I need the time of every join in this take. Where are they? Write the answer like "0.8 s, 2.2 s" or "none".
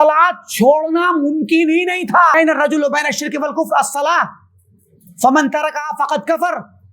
2.3 s

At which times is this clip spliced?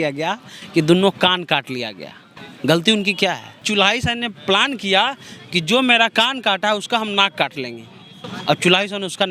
3.6 s

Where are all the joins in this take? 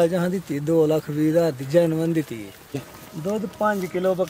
2.8 s

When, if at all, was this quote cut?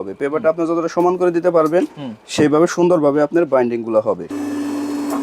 4.3 s

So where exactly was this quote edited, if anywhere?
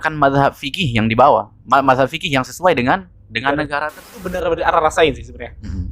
4.4 s

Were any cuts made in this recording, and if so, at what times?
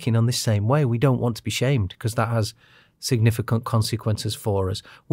none

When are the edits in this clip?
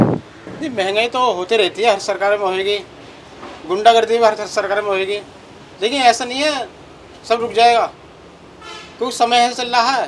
none

